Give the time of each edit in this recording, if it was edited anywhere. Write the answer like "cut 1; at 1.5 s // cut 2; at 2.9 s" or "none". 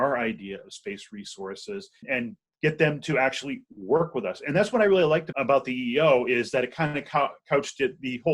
cut 1; at 2.1 s // cut 2; at 5.3 s